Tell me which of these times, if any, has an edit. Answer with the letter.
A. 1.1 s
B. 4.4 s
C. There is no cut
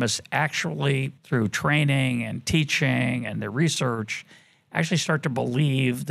A